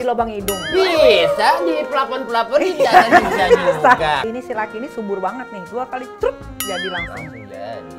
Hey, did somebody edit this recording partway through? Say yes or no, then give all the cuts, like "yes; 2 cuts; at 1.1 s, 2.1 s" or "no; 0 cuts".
yes; 1 cut; at 4.2 s